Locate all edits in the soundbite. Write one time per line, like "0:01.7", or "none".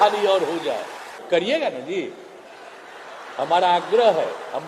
0:01.2

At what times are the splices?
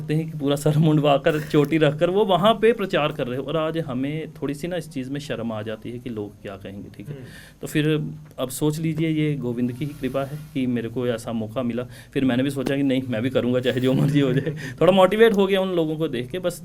none

